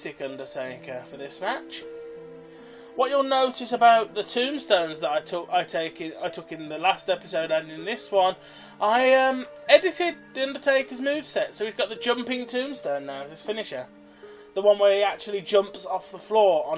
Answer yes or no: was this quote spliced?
yes